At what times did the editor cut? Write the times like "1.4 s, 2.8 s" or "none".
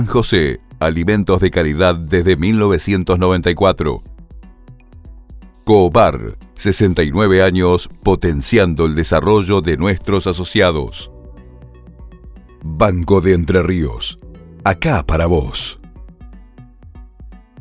4.0 s, 5.6 s